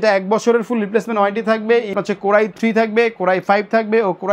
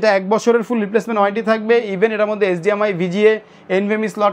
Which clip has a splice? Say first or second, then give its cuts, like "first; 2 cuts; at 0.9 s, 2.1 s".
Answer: first; 1 cut; at 1.9 s